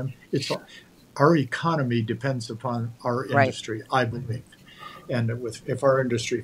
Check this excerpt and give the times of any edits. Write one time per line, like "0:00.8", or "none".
none